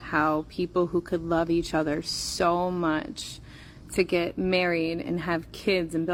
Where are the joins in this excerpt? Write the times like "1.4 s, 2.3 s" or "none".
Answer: none